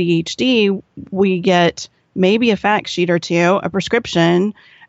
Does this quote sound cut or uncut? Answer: uncut